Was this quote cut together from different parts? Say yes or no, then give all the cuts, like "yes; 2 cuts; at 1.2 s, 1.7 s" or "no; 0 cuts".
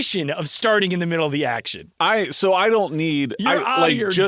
no; 0 cuts